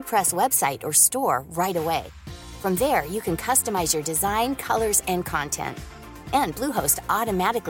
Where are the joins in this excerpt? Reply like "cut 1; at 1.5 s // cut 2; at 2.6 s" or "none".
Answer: none